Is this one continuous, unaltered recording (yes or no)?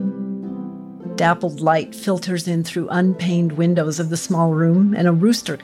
no